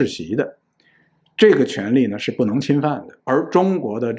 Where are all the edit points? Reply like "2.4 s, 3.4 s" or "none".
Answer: 3.1 s